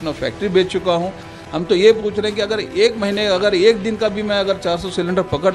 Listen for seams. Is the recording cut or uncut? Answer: cut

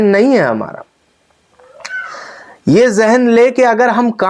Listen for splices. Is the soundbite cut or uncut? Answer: uncut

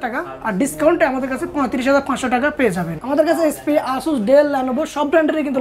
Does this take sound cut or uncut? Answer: uncut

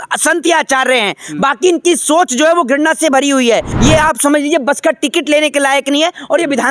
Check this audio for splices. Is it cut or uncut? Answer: cut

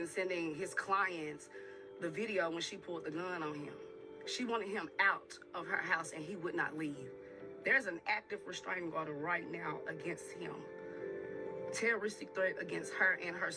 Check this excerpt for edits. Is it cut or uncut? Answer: uncut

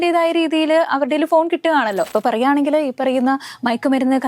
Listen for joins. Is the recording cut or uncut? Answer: cut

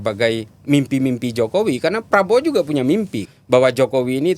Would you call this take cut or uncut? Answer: cut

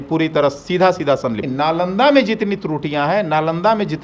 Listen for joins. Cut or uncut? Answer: cut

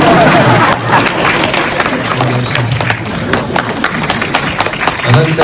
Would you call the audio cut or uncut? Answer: cut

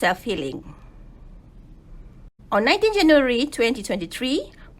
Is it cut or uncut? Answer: cut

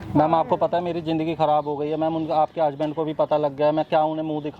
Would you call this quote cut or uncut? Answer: uncut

